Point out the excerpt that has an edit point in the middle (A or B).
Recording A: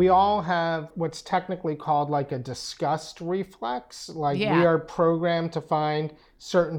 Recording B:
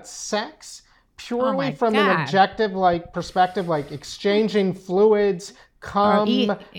A